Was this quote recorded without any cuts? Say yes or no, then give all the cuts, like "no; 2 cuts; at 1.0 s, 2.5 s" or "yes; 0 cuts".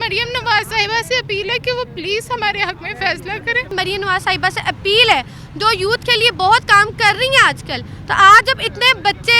no; 1 cut; at 3.7 s